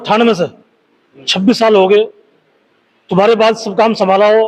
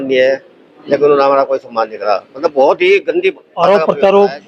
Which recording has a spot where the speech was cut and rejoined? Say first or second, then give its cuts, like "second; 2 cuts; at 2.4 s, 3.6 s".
second; 1 cut; at 3.5 s